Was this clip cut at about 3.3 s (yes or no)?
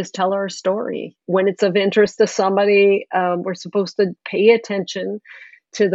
no